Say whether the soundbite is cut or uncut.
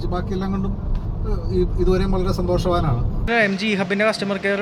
cut